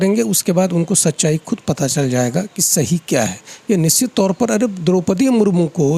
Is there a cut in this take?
no; 0 cuts

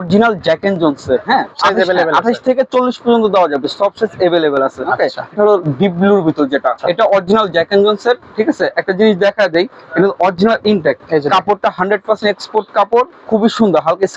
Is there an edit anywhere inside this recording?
yes; 4 cuts; at 1.5 s, 5.3 s, 6.8 s, 11.0 s

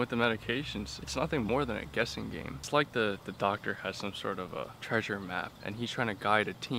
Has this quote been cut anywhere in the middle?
yes; 4 cuts; at 1.0 s, 2.6 s, 4.8 s, 5.5 s

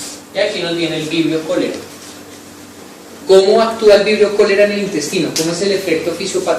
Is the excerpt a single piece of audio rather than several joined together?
no; 1 cut; at 5.2 s

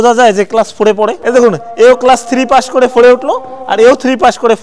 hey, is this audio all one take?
yes; 0 cuts

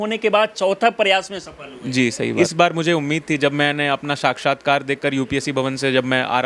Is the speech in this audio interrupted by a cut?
yes; 1 cut; at 2.4 s

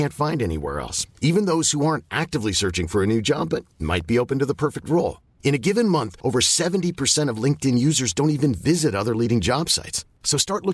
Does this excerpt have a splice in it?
no; 0 cuts

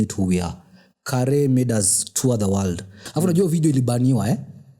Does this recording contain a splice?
yes; 1 cut; at 3.0 s

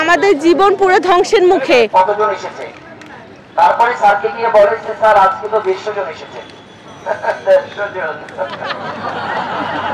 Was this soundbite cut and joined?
no; 0 cuts

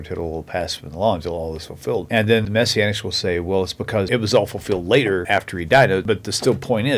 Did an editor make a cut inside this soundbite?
yes; 3 cuts; at 2.3 s, 5.2 s, 6.0 s

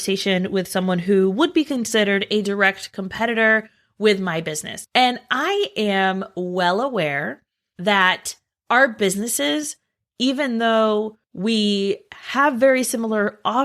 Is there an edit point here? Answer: yes; 1 cut; at 4.7 s

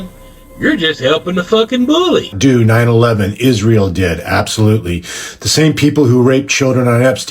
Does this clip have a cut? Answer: yes; 1 cut; at 2.3 s

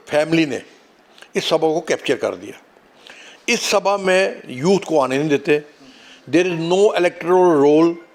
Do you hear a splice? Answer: no; 0 cuts

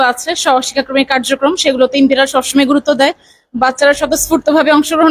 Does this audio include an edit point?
no; 0 cuts

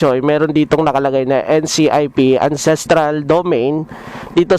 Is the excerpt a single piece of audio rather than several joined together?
yes; 0 cuts

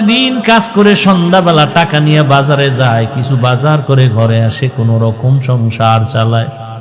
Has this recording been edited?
no; 0 cuts

